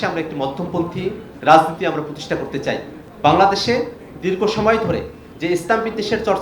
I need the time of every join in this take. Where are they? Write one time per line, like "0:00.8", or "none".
0:01.3
0:03.0
0:05.2